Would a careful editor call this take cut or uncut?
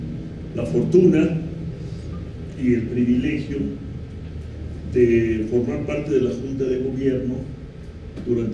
cut